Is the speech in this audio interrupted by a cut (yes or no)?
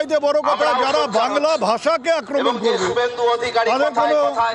no